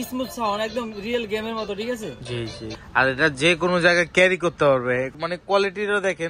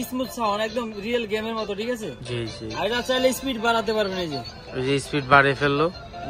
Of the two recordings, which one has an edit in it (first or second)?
first